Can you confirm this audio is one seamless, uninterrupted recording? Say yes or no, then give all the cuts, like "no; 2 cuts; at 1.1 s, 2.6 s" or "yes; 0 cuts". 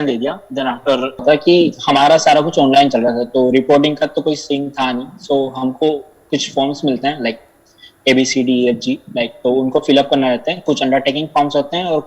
no; 1 cut; at 1.2 s